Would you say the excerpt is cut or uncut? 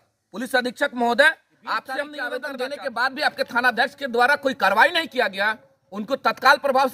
cut